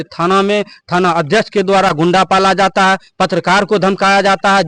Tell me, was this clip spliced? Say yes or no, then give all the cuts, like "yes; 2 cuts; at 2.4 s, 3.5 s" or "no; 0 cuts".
no; 0 cuts